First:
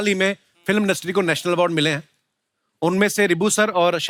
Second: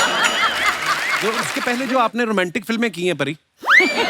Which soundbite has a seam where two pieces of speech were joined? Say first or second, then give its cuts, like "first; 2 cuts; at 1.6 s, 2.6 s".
second; 1 cut; at 1.5 s